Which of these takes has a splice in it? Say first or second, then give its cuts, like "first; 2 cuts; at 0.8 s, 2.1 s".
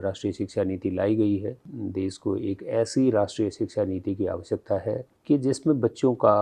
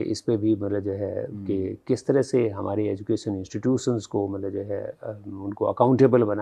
first; 1 cut; at 1.7 s